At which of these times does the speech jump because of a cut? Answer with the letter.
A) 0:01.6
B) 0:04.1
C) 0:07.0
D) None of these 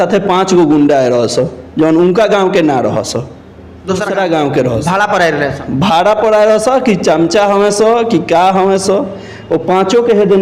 B